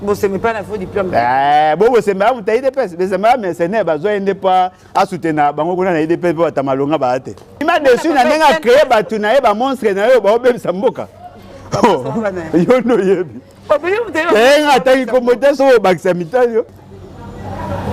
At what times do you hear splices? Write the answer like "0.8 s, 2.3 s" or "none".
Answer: 7.6 s, 16.8 s